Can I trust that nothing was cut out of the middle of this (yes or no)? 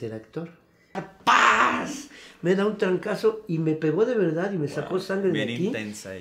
no